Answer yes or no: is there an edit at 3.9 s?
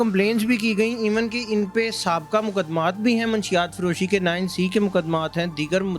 no